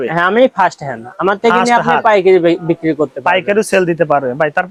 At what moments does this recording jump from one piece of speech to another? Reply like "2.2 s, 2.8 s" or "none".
none